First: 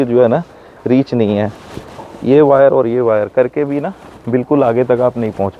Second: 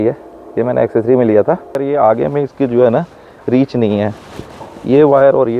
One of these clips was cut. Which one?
second; 1 cut; at 1.7 s

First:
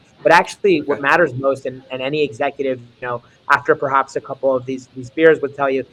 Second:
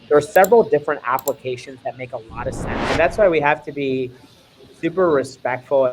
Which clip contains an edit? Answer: second; 1 cut; at 2.9 s

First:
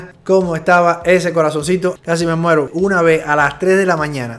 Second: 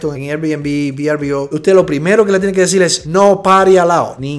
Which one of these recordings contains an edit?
first; 1 cut; at 2.7 s

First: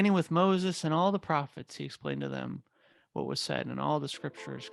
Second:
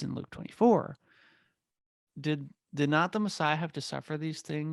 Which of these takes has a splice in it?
second; 1 cut; at 2.0 s

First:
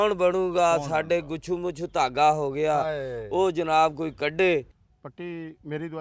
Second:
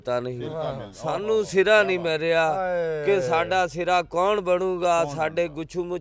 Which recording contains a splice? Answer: first; 1 cut; at 4.8 s

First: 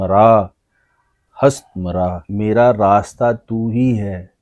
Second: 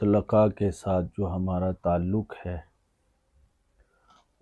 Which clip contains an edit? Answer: first; 1 cut; at 2.2 s

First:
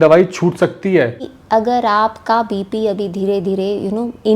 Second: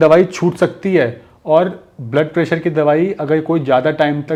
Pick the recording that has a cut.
first; 1 cut; at 1.3 s

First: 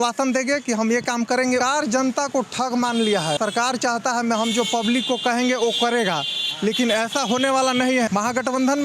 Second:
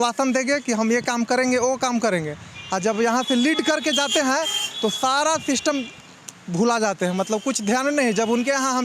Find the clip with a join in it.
first; 3 cuts; at 1.6 s, 3.4 s, 8.1 s

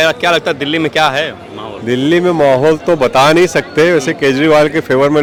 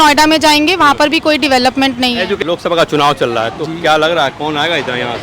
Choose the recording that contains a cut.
second; 1 cut; at 2.4 s

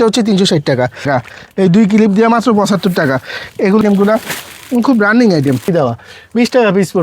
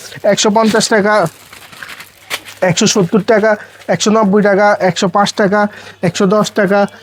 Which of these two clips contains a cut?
first; 2 cuts; at 1.1 s, 5.7 s

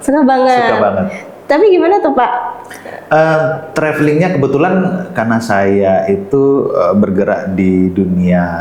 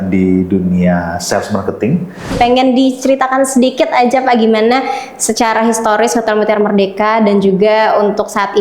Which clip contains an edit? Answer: second; 1 cut; at 2.3 s

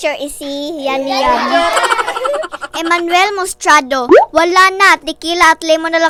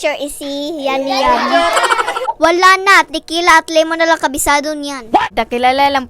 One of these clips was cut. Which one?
second; 2 cuts; at 2.3 s, 5.3 s

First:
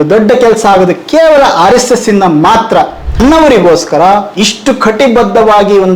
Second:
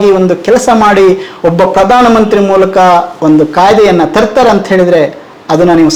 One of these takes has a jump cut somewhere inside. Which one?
first; 1 cut; at 3.2 s

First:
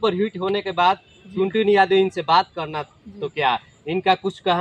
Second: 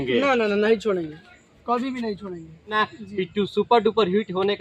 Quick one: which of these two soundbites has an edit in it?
second; 1 cut; at 2.7 s

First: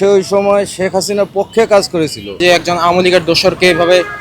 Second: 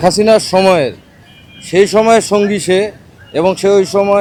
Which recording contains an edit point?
first; 1 cut; at 2.3 s

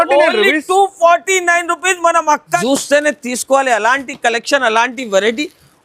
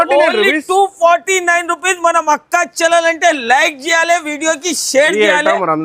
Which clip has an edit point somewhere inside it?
first; 1 cut; at 2.6 s

